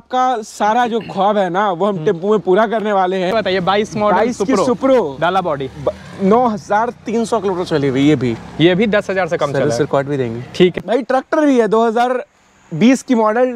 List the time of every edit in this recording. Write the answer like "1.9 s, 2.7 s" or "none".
3.3 s, 10.8 s